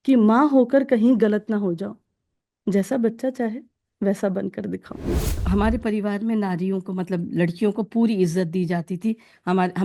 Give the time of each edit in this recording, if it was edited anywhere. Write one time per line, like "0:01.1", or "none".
0:05.4